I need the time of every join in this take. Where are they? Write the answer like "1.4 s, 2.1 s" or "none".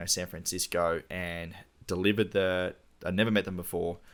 none